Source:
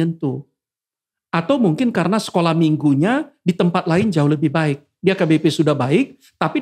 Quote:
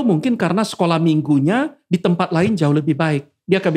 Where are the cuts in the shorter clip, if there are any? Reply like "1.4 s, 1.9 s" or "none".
none